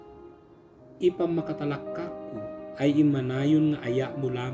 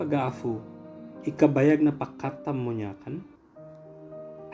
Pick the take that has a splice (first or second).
first